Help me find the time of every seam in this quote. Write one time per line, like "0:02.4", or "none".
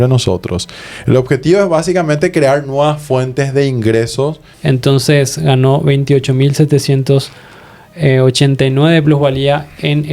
0:04.5